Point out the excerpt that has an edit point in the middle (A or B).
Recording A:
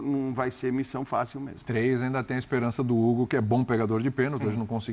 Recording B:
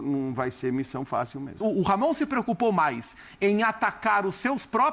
B